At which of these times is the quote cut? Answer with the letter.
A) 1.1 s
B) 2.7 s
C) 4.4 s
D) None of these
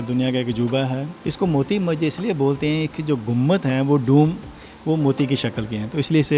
A